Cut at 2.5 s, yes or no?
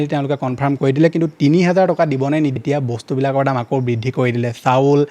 yes